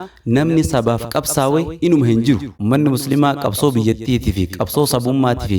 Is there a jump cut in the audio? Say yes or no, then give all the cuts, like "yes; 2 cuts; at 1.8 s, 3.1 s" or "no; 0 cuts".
yes; 1 cut; at 2.5 s